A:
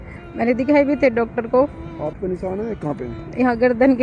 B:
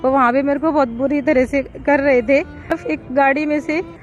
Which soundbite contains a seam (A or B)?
B